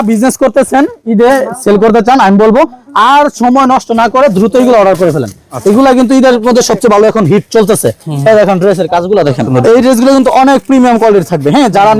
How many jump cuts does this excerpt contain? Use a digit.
1